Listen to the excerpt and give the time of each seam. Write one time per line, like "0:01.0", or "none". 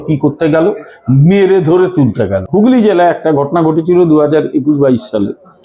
0:02.4

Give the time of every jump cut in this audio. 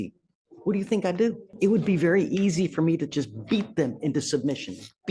0:01.5

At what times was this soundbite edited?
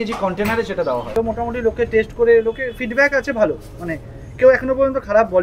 0:01.1

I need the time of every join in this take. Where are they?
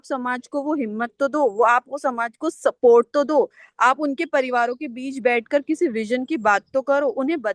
none

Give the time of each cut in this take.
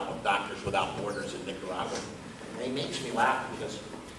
0:02.0

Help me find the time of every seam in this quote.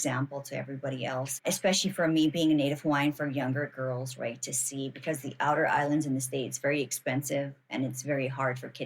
0:01.3

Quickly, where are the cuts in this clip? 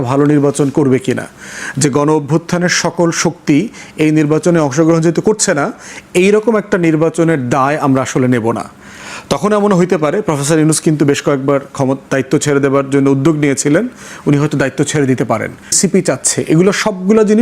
0:15.7

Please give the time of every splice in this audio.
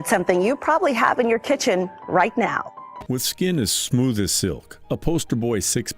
0:03.0

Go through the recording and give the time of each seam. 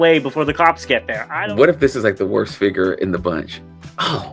0:01.2

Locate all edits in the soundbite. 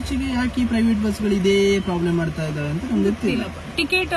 none

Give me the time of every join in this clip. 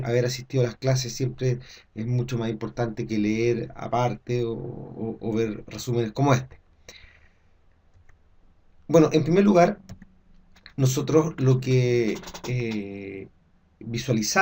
0:09.2

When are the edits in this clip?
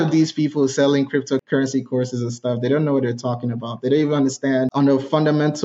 0:01.4
0:04.7

